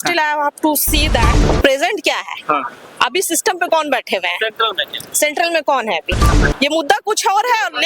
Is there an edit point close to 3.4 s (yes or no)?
no